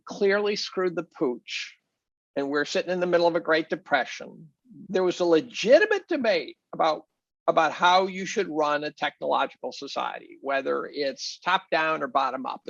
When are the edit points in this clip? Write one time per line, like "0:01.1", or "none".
0:04.8